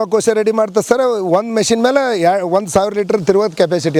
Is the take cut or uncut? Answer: uncut